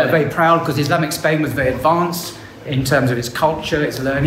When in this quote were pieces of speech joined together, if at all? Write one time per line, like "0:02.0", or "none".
none